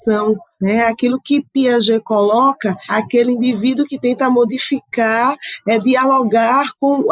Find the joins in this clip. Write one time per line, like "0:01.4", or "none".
0:02.8